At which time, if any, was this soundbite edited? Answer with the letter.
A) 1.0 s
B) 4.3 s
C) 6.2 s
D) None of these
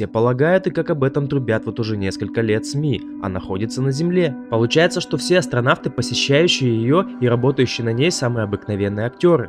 C